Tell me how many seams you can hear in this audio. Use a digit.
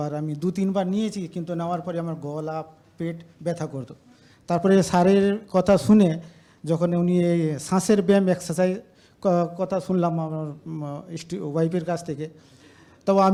0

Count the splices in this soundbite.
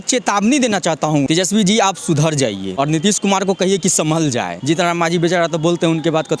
3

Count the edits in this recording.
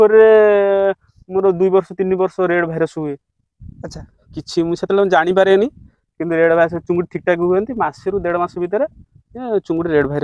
0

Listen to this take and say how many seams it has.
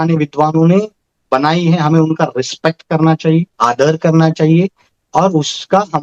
0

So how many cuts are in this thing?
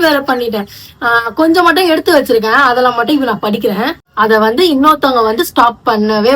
1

